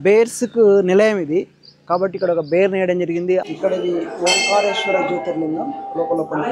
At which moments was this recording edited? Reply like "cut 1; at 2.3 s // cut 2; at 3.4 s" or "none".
cut 1; at 3.4 s